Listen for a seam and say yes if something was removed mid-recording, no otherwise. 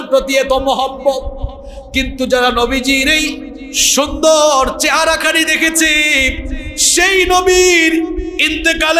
no